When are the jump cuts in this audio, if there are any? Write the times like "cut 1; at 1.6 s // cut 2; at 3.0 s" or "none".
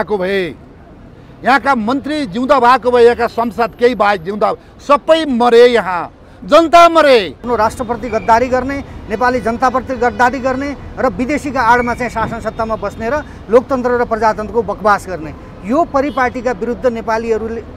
cut 1; at 7.4 s